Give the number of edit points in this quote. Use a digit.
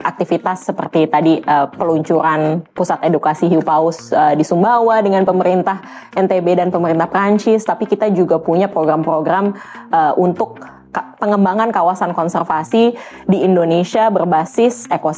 0